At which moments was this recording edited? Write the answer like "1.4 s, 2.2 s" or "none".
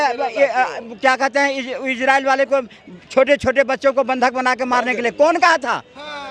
none